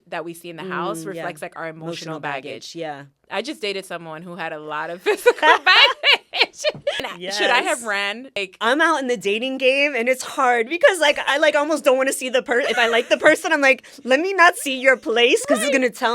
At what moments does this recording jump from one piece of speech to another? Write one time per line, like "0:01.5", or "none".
0:07.1
0:08.4